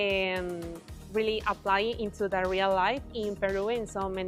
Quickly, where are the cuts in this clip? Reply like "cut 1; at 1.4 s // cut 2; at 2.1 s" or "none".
none